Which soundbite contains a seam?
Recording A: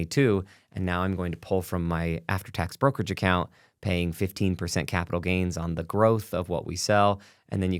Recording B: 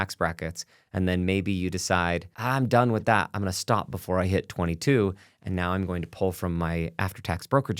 B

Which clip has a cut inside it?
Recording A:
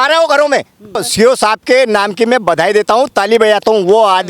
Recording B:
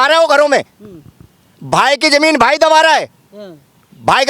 A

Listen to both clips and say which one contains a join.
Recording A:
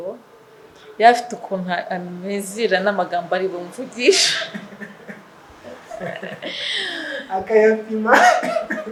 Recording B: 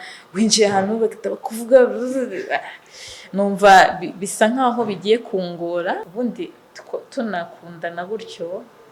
B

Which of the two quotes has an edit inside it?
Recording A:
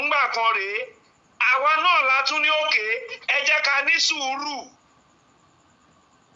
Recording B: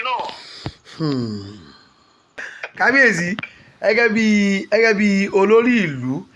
B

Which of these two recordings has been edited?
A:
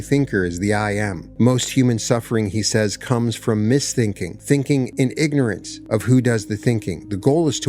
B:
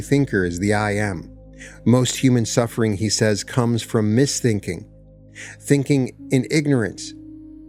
A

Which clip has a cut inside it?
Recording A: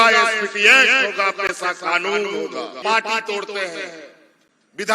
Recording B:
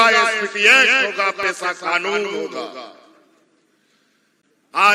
A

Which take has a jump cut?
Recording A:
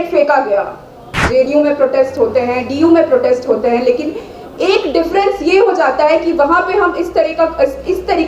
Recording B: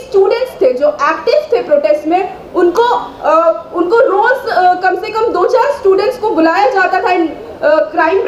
A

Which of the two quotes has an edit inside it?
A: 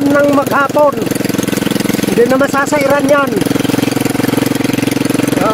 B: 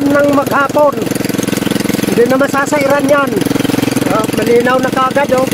B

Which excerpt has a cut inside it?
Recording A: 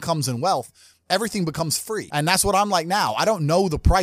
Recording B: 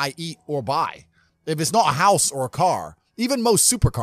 A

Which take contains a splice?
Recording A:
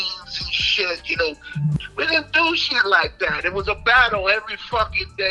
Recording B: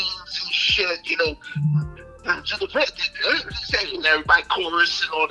A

